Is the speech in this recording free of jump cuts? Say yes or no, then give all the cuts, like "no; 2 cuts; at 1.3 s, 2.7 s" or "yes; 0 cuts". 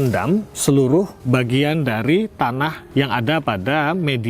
no; 2 cuts; at 1.2 s, 2.8 s